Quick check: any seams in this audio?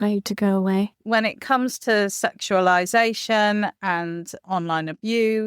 yes; 1 cut; at 1.0 s

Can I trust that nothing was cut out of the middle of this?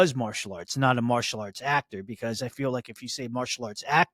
yes; 0 cuts

